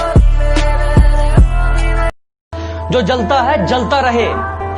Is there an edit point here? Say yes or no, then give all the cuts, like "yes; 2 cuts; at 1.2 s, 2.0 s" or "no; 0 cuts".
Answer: yes; 1 cut; at 2.1 s